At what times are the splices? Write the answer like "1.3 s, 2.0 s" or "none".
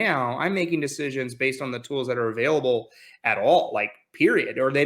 none